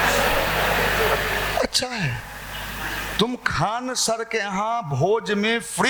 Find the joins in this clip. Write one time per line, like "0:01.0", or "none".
none